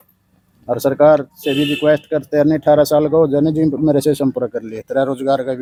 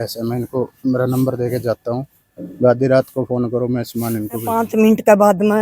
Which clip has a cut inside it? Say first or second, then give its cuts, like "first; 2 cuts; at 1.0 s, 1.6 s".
second; 1 cut; at 4.6 s